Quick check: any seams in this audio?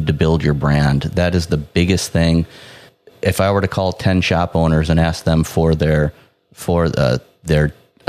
yes; 1 cut; at 2.9 s

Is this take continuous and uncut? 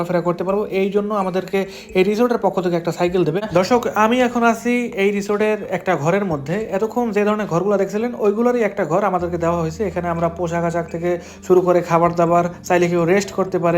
no; 1 cut; at 3.4 s

